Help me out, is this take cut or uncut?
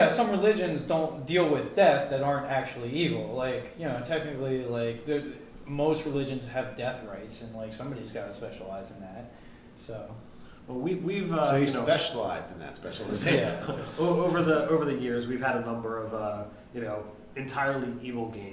cut